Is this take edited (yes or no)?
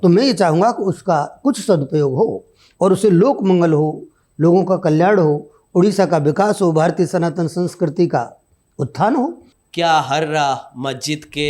yes